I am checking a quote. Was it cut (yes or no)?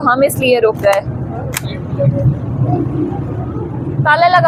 no